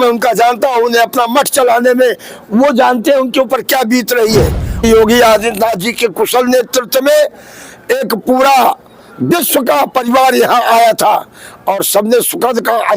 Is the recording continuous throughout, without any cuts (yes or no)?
no